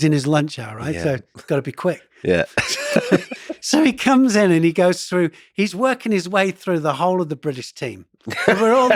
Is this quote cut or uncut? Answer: uncut